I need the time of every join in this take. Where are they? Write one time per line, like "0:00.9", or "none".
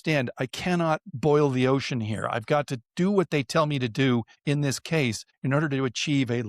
none